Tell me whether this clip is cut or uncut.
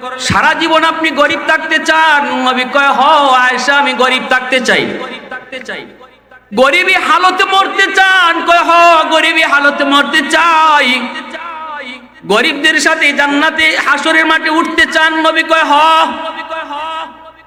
uncut